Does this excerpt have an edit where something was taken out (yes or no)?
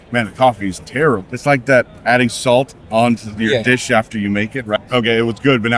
yes